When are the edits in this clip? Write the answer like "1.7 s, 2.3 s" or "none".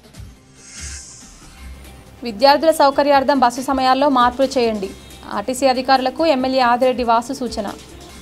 1.4 s